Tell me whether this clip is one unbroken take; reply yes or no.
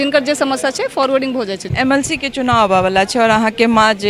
no